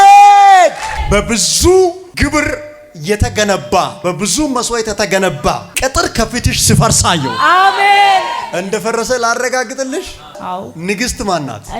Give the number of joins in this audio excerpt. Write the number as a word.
five